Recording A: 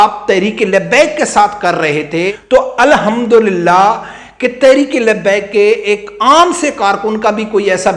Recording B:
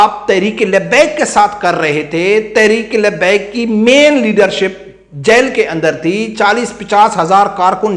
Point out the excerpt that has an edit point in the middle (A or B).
A